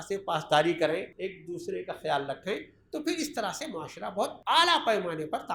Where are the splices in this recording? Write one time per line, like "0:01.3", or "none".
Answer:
0:01.1
0:04.4